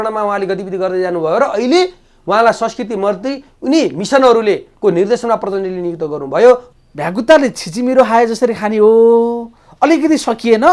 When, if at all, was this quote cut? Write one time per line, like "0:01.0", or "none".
0:06.7